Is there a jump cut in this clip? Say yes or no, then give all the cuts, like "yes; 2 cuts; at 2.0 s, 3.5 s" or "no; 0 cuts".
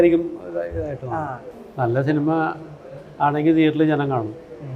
yes; 1 cut; at 1.4 s